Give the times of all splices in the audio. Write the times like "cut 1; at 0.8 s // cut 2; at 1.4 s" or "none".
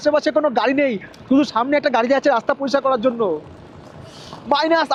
none

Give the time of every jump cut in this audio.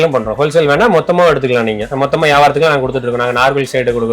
cut 1; at 1.8 s

